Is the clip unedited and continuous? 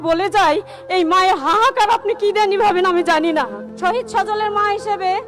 no; 1 cut; at 3.6 s

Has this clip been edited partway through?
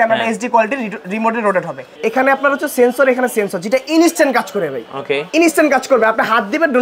yes; 1 cut; at 1.9 s

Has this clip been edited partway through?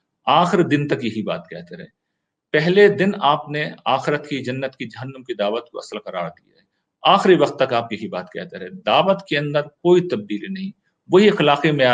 no; 0 cuts

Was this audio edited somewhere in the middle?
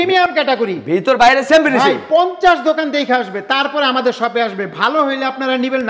no; 0 cuts

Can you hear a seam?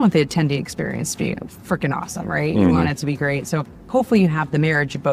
no; 0 cuts

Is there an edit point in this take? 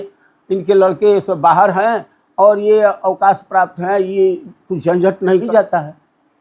yes; 1 cut; at 5.5 s

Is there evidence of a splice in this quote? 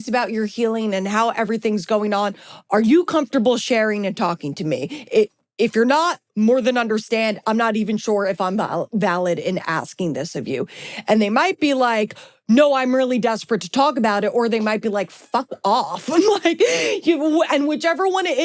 no; 0 cuts

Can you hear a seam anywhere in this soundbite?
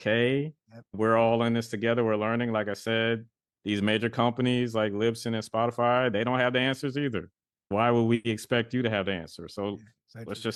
no; 0 cuts

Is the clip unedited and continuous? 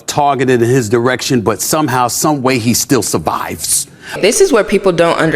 no; 1 cut; at 4.2 s

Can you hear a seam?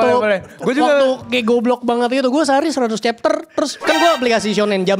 yes; 1 cut; at 3.8 s

